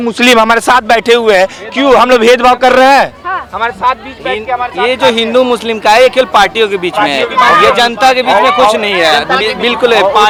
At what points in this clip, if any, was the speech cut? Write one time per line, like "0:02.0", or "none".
none